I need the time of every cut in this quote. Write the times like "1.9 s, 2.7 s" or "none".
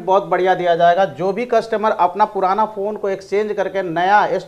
none